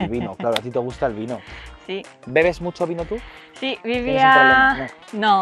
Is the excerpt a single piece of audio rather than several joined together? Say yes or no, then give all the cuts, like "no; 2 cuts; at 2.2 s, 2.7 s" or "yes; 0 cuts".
yes; 0 cuts